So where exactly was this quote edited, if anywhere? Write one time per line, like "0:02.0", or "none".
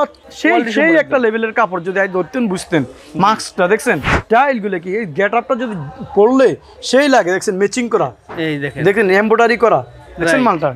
0:04.1